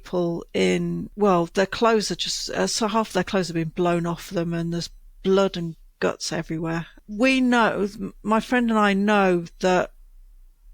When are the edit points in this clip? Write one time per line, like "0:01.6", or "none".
0:01.1
0:06.9